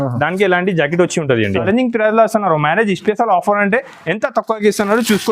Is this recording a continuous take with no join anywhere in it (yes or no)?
no